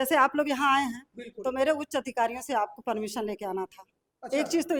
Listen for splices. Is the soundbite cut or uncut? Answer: uncut